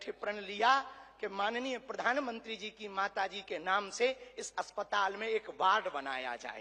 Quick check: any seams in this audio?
no; 0 cuts

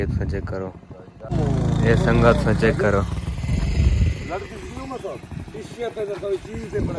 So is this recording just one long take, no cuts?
yes; 0 cuts

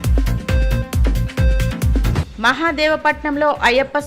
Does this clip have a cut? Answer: yes; 1 cut; at 2.1 s

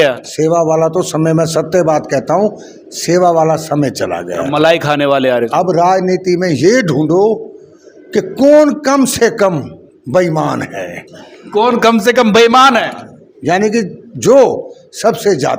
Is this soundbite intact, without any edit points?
yes; 0 cuts

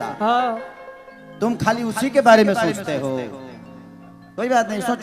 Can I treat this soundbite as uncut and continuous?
yes; 0 cuts

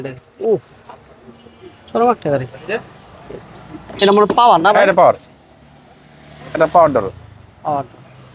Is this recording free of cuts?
yes; 0 cuts

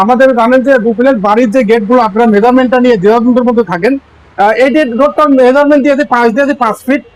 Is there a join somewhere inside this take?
no; 0 cuts

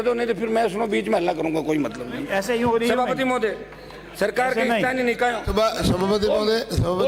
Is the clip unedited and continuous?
yes; 0 cuts

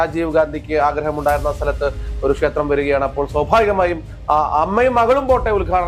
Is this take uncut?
yes; 0 cuts

